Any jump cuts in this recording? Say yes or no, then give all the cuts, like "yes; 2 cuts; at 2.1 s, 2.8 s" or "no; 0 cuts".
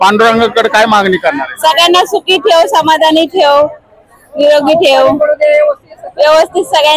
no; 0 cuts